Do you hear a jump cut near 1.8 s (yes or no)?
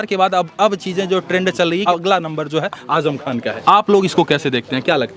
yes